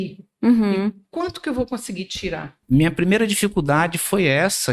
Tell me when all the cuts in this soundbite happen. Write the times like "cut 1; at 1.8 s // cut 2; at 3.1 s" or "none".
cut 1; at 2.6 s